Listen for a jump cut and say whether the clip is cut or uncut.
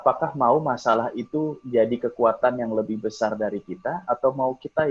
uncut